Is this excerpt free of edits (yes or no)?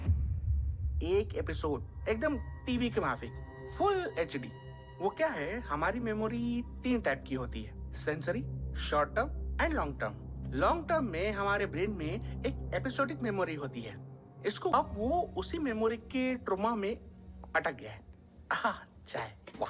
no